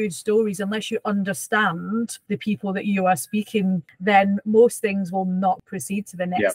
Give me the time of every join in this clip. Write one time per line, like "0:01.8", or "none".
0:02.2
0:03.9
0:05.6